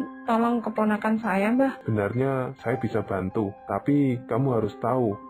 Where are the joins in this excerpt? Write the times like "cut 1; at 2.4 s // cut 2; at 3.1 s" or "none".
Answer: cut 1; at 1.8 s